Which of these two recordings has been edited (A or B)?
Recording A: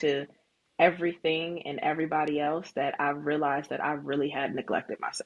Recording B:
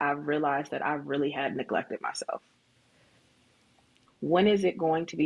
B